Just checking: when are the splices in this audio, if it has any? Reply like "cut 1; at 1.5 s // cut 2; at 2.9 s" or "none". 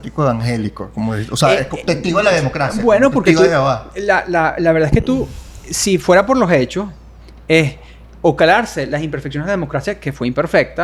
none